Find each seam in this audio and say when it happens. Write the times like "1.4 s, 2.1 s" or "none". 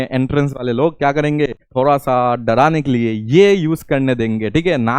1.6 s